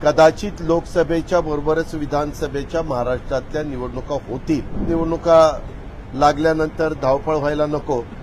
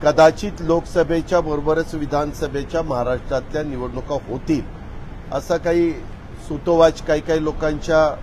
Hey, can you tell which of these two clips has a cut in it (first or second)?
first